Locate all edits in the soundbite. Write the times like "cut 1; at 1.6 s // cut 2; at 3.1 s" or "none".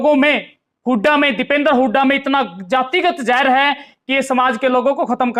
none